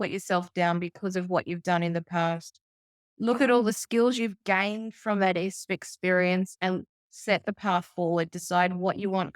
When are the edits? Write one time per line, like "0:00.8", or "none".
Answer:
none